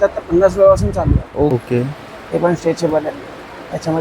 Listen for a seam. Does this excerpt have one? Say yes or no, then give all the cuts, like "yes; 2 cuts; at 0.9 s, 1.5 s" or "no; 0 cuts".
yes; 1 cut; at 1.6 s